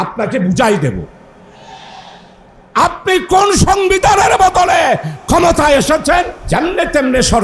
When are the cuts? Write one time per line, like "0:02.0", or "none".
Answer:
0:06.4